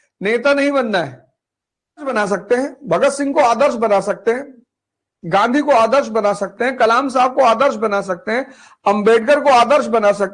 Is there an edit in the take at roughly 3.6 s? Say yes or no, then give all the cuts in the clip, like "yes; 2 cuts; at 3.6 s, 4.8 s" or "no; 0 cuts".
no; 1 cut; at 2.1 s